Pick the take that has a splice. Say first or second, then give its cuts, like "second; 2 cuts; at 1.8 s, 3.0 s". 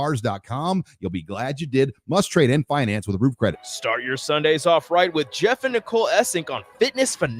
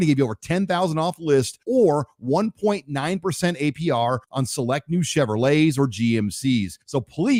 first; 1 cut; at 3.6 s